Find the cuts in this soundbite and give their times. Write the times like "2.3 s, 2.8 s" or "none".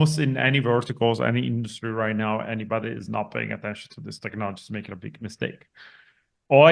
none